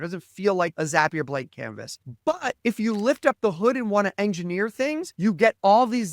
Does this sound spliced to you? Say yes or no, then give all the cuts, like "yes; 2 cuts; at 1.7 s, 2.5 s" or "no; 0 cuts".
no; 0 cuts